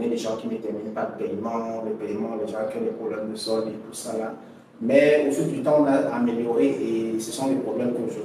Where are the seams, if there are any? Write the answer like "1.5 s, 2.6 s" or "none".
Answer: none